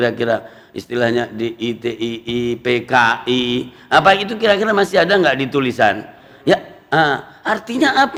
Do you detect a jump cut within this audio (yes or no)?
no